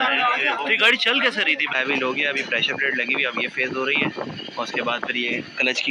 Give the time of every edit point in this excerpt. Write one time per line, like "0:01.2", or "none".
0:01.7

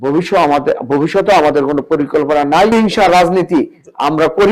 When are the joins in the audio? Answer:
0:02.7

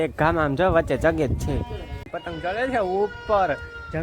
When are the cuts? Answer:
0:02.2

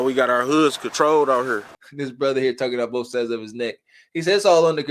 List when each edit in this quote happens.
0:01.8

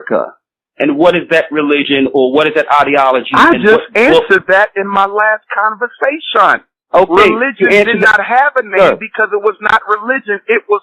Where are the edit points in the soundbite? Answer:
none

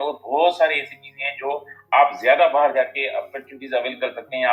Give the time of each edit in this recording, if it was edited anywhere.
none

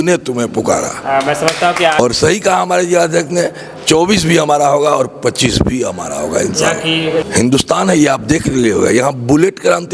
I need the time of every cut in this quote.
0:02.0
0:07.2

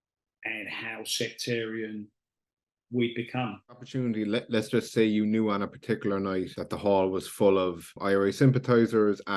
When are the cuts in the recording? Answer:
0:03.9
0:06.6
0:07.9

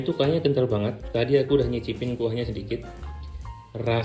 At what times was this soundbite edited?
none

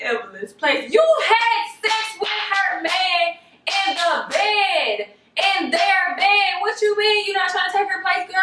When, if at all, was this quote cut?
none

